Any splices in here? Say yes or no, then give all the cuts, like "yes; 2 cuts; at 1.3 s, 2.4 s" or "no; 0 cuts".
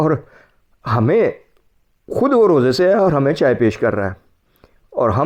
no; 0 cuts